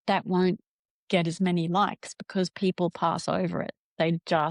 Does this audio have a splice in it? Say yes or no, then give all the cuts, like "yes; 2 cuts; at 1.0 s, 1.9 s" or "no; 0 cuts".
no; 0 cuts